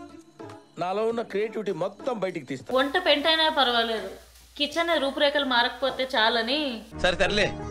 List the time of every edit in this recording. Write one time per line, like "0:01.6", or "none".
0:02.6

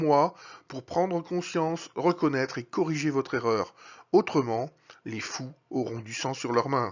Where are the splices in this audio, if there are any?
0:04.4

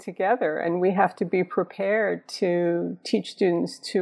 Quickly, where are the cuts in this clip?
none

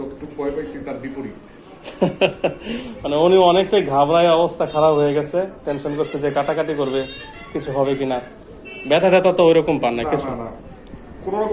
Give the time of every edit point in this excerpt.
none

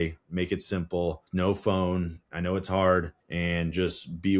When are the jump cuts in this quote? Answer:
0:01.2
0:03.2

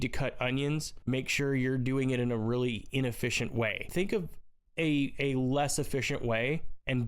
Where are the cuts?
0:00.9
0:03.9

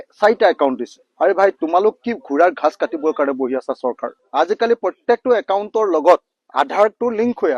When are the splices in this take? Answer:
none

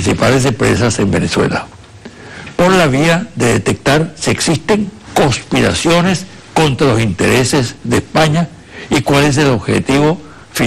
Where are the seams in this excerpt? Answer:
none

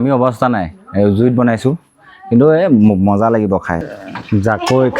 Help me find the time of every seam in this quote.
0:03.8

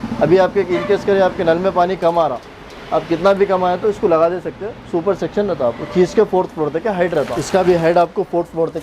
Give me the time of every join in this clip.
0:07.5

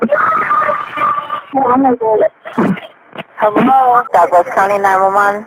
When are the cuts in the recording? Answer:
0:04.1

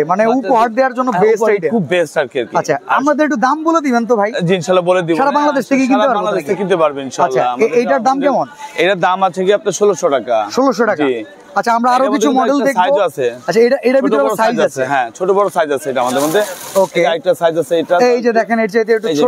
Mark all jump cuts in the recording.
none

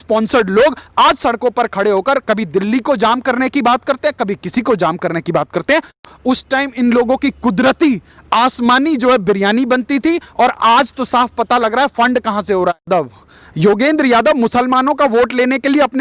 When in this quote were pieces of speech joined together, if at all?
0:06.0
0:12.9

